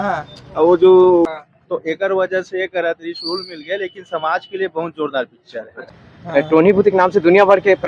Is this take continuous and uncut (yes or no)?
no